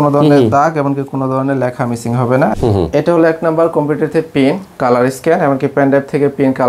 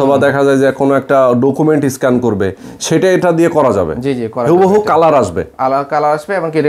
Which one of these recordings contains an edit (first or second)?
first